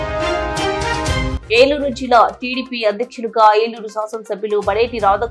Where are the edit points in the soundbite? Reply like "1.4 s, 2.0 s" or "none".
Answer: none